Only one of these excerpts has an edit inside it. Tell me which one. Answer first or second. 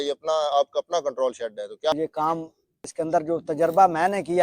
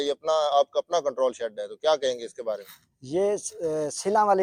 first